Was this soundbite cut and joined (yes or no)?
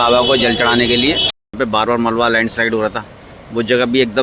yes